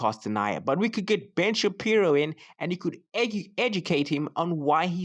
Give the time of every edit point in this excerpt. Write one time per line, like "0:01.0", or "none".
none